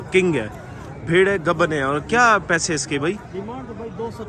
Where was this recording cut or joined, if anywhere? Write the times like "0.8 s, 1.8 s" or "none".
none